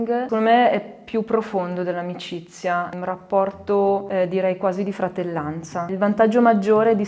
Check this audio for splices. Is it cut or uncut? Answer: cut